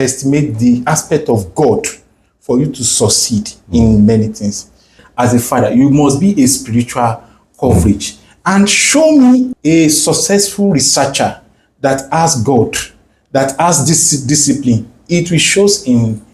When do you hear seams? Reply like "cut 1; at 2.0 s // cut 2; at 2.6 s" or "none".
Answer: cut 1; at 5.0 s // cut 2; at 9.5 s